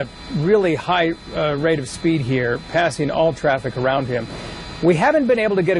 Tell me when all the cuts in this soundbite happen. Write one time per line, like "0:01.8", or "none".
none